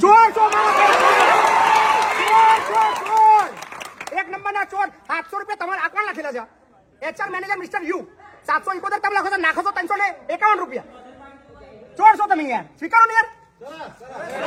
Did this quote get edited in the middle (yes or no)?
no